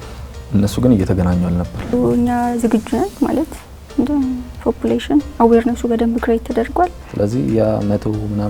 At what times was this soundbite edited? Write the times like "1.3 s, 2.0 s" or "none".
1.9 s, 7.0 s